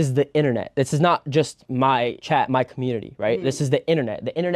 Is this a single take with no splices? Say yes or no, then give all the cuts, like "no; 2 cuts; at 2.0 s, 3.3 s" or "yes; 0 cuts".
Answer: no; 1 cut; at 2.2 s